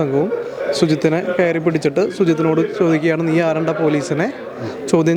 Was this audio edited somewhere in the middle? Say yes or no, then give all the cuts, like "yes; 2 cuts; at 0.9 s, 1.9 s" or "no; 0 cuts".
no; 0 cuts